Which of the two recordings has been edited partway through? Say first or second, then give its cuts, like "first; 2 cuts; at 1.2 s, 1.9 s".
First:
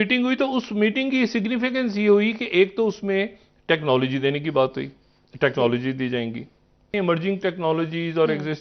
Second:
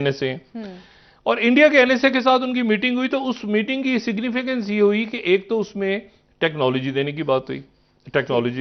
first; 1 cut; at 6.9 s